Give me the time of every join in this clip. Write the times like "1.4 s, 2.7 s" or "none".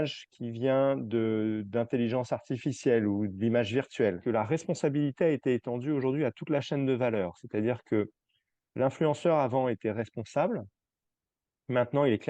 4.2 s